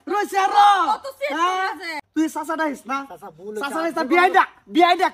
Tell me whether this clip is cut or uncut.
cut